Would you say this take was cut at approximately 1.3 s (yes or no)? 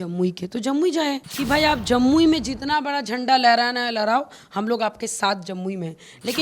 yes